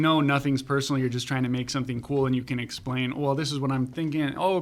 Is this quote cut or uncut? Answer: uncut